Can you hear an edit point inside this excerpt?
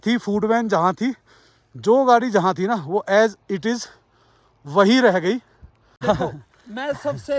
yes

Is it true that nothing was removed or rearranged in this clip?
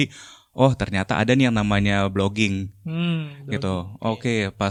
yes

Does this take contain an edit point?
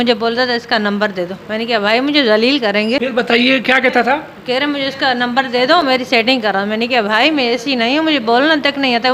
yes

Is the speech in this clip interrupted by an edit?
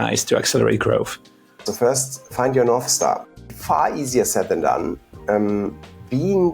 yes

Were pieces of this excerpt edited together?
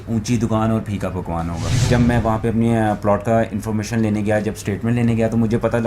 yes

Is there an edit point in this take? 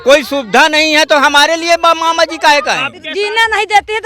yes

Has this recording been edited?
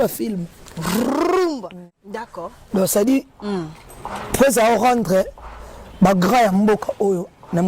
yes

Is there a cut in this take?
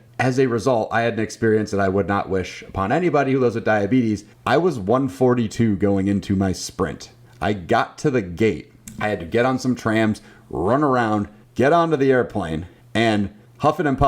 yes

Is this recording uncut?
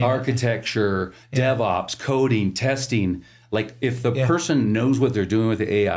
yes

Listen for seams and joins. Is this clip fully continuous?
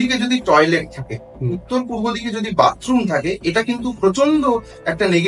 yes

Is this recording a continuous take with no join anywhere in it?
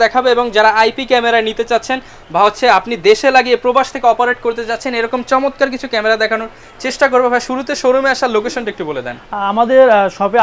yes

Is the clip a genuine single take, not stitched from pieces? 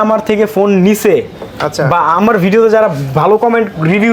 yes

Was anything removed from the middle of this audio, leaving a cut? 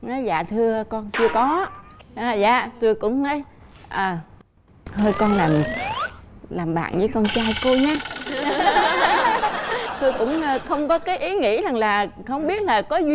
no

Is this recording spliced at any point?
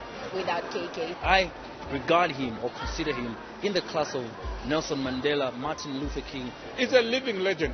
yes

